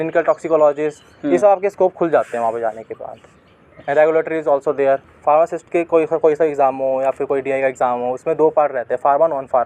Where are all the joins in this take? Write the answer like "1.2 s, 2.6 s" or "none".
5.1 s